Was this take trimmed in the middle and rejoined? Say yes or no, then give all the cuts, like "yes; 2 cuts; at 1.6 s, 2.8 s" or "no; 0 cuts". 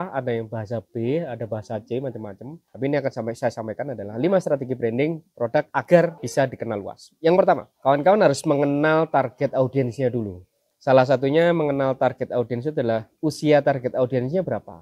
no; 0 cuts